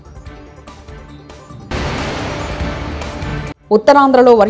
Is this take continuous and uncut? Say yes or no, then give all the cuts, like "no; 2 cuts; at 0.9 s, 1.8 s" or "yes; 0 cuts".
yes; 0 cuts